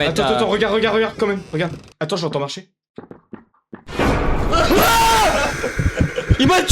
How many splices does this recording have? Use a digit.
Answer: 1